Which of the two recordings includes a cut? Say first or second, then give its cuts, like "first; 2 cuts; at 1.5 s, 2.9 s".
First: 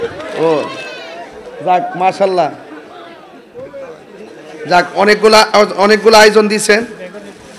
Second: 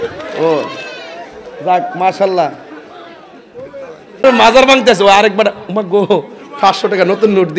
second; 1 cut; at 4.2 s